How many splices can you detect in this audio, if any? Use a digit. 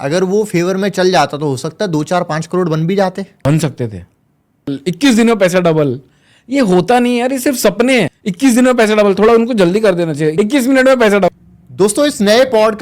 1